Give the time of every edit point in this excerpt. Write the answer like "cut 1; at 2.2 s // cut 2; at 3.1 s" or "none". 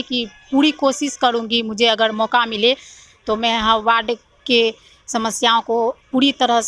none